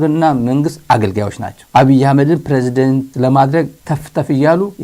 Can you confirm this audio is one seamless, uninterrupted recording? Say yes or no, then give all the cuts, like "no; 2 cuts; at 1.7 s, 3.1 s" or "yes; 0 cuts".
yes; 0 cuts